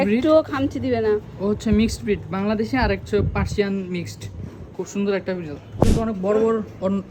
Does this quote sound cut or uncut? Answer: cut